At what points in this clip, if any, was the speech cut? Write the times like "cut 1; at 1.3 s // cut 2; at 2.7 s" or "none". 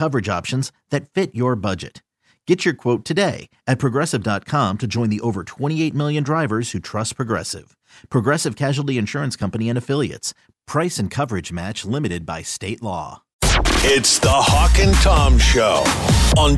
cut 1; at 13.3 s